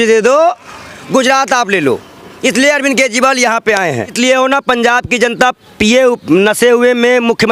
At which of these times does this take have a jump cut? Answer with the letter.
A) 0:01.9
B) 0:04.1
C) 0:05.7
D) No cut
B